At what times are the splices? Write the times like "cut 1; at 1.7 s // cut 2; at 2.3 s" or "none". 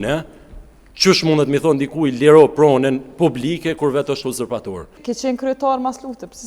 cut 1; at 5.0 s

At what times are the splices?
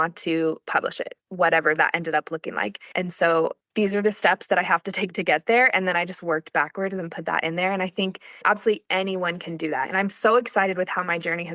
cut 1; at 2.8 s // cut 2; at 8.4 s

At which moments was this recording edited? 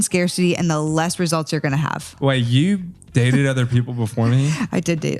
cut 1; at 2.1 s

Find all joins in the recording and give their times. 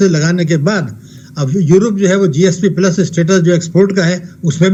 none

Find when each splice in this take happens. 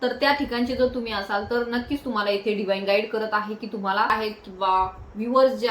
cut 1; at 4.1 s

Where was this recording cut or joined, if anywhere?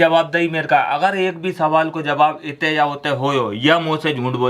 none

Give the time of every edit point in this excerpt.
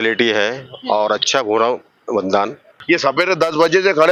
cut 1; at 2.7 s

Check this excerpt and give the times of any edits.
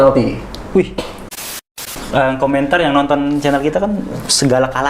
cut 1; at 1.6 s

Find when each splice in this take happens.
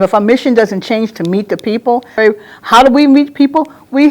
cut 1; at 2.2 s

